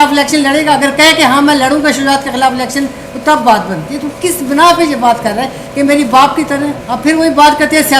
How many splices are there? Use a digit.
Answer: 1